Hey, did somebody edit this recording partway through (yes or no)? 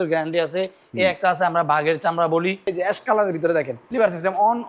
yes